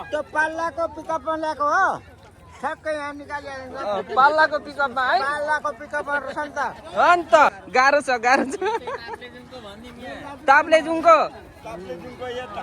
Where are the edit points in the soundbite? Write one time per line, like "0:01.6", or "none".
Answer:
0:07.6